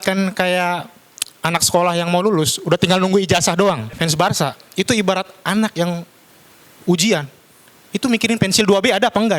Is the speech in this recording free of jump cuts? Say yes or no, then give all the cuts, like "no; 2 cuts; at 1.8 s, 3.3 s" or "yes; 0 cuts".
no; 1 cut; at 3.9 s